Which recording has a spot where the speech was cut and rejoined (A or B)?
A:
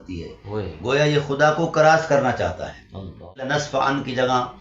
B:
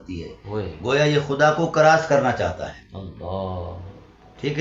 A